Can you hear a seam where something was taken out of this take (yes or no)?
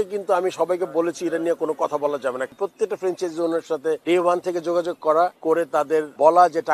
yes